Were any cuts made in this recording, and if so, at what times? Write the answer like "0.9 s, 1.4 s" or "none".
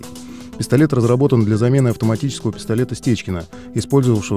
3.5 s